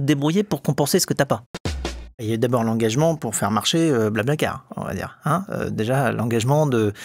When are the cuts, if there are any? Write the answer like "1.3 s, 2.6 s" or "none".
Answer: 1.8 s

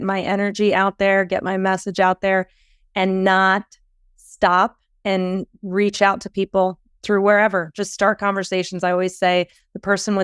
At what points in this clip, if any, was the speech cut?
6.8 s

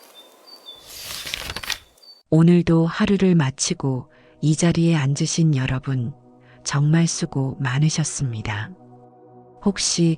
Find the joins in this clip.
1.0 s, 2.1 s

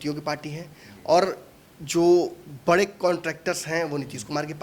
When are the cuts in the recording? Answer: none

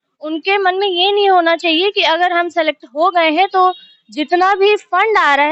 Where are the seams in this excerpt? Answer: none

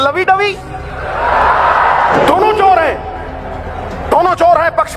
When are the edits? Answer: none

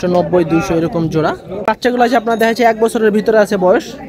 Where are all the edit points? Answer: 1.6 s

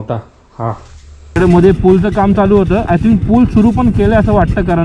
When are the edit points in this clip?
1.4 s

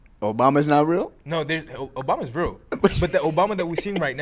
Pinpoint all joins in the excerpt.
none

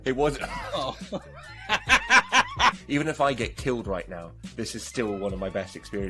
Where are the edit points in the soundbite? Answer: 2.8 s

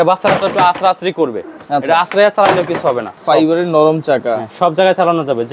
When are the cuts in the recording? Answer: 3.1 s

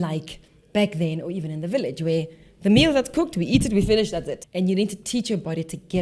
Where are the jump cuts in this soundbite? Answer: 4.4 s

